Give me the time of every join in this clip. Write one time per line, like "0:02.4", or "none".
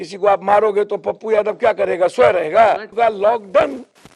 0:02.9